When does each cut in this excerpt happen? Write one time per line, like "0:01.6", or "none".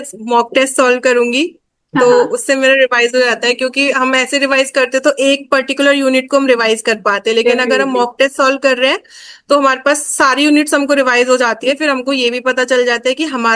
none